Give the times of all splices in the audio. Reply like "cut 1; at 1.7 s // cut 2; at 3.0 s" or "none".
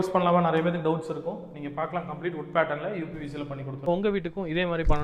cut 1; at 3.9 s